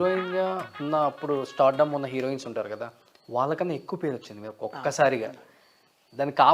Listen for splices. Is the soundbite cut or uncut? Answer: uncut